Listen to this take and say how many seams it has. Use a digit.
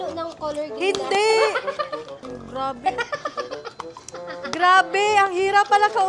1